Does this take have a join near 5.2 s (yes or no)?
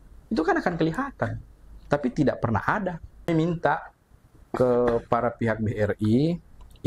no